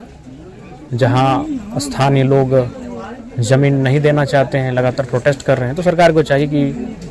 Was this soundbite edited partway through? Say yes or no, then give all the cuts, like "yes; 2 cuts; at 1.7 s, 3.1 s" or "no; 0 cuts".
no; 0 cuts